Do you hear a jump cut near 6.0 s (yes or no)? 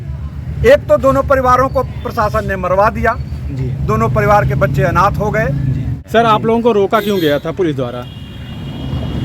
yes